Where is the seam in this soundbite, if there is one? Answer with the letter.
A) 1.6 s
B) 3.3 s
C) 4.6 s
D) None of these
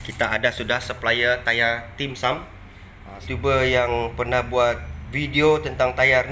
B